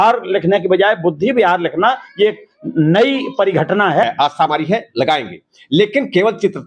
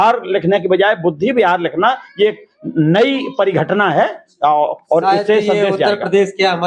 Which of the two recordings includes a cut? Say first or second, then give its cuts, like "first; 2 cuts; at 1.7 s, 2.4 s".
first; 1 cut; at 4.1 s